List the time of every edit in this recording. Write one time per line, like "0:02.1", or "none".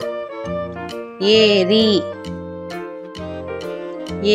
0:02.0
0:03.5